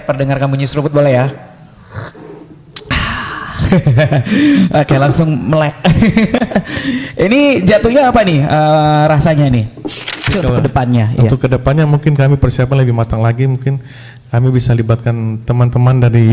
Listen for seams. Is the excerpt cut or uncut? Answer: cut